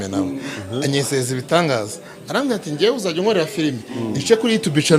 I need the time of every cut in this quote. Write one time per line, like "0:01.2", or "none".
none